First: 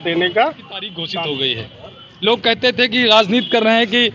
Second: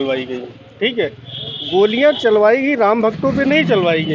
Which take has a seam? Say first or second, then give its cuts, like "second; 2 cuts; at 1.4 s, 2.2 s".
first; 1 cut; at 0.9 s